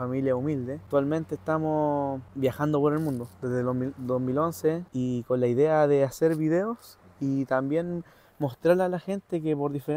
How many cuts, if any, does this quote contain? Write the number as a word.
three